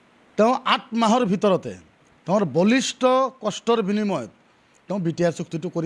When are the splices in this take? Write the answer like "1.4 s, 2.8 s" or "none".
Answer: none